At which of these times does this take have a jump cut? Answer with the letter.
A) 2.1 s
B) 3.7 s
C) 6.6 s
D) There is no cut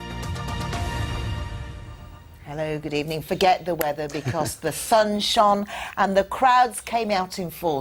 D